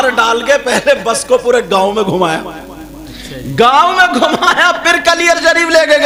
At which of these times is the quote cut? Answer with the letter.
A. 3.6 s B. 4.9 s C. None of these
C